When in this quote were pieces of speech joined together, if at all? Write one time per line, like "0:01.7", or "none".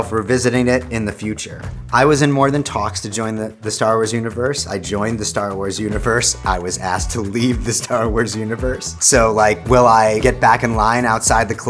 0:10.2